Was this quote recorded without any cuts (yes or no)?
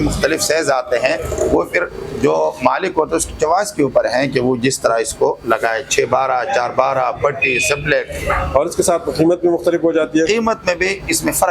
yes